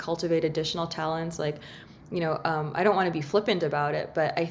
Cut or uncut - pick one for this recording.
uncut